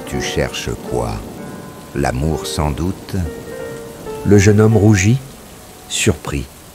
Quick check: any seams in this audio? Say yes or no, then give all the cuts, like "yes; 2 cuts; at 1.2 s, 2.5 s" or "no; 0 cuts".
no; 0 cuts